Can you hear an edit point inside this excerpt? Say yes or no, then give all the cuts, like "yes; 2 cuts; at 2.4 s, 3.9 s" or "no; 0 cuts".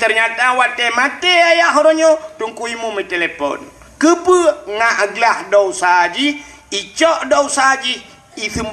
no; 0 cuts